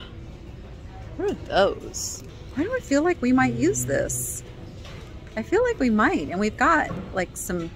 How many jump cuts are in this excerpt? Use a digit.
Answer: 1